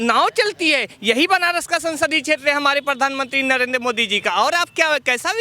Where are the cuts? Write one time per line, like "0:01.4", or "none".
none